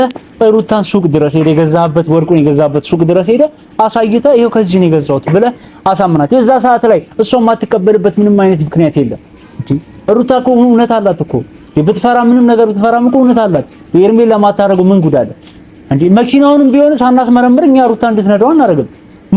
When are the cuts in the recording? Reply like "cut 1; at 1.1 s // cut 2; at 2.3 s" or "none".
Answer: none